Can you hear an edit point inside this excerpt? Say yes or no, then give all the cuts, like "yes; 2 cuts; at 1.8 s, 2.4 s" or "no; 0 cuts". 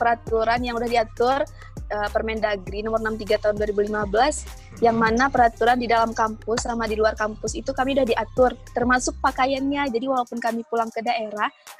no; 0 cuts